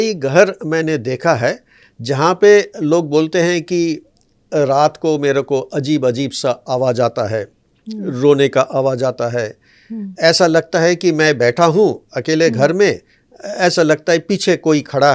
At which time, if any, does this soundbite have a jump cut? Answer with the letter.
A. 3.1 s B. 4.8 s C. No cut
C